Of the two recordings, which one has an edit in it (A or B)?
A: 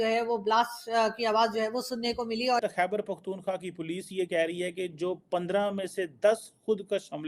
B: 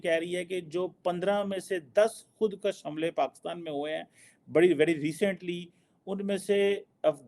A